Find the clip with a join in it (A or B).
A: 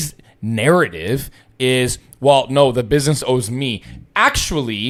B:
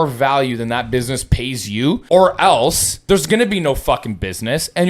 B